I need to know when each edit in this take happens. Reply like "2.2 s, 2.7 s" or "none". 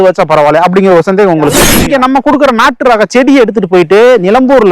1.7 s